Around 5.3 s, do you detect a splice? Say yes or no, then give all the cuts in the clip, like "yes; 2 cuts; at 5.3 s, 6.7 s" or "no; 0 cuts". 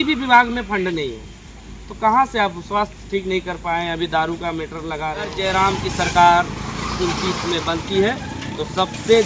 yes; 1 cut; at 5.3 s